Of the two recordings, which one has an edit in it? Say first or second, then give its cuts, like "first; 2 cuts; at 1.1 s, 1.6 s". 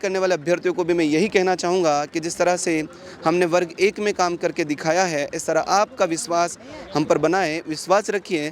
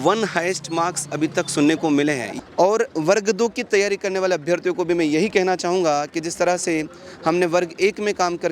second; 1 cut; at 2.3 s